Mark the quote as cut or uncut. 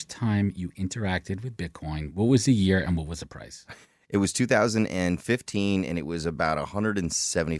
uncut